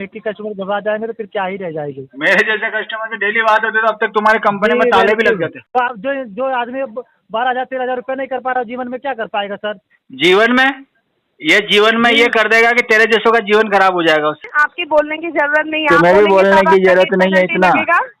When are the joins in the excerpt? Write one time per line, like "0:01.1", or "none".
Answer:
0:05.6
0:14.5

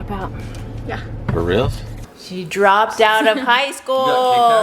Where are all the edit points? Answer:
0:02.1

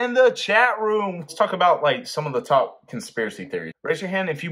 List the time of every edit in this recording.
0:01.2

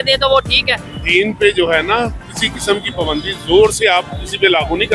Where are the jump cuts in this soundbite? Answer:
0:01.0

